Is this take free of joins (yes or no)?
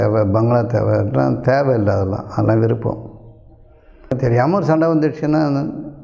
no